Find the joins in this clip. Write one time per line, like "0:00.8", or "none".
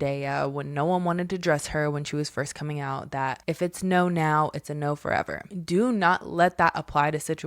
0:03.4